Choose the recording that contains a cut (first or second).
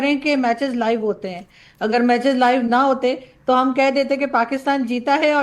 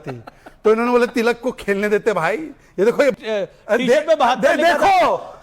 second